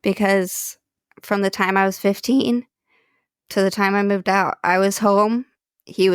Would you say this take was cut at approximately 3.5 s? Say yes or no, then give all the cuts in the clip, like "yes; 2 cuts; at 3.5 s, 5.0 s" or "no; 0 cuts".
no; 1 cut; at 1.0 s